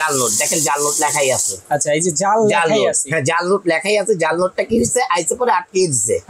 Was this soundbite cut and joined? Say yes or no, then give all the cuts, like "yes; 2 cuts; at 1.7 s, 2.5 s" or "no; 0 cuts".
no; 0 cuts